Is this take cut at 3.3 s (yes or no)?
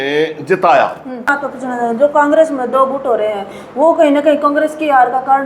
no